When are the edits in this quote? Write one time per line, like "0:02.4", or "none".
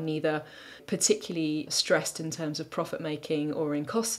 0:00.8
0:01.7